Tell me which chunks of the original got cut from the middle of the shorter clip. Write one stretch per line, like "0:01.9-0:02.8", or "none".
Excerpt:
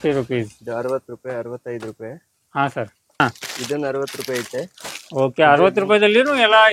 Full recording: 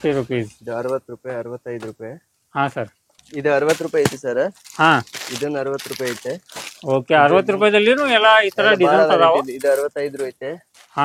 0:03.2-0:04.9